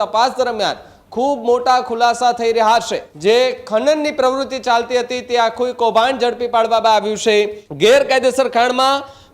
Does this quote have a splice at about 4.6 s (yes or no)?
no